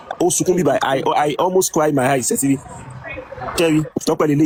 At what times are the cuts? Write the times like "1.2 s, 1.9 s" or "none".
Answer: none